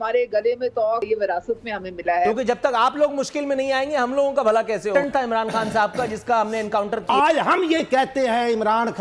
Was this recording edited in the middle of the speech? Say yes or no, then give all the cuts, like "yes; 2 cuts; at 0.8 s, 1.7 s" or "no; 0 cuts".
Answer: yes; 4 cuts; at 1.1 s, 2.3 s, 4.9 s, 7.0 s